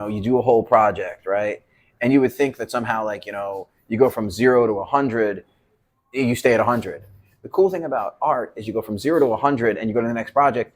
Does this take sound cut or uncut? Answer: uncut